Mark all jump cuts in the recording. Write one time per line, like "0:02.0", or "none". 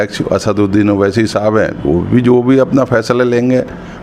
none